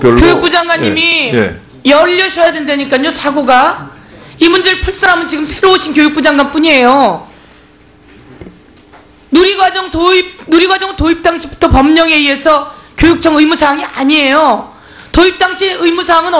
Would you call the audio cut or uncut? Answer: uncut